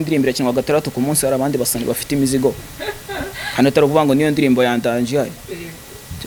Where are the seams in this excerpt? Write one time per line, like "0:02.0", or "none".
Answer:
none